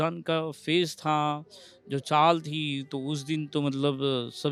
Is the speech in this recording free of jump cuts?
yes; 0 cuts

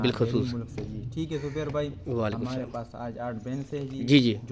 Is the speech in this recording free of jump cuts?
yes; 0 cuts

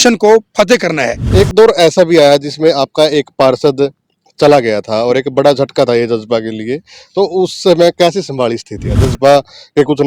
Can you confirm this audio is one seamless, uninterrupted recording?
no; 2 cuts; at 1.2 s, 8.9 s

